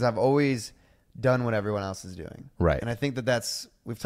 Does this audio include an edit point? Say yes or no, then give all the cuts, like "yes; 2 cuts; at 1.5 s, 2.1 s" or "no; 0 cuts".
no; 0 cuts